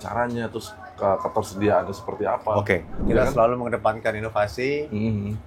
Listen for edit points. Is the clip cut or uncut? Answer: cut